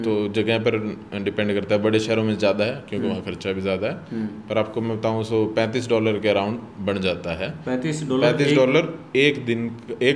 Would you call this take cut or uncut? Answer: uncut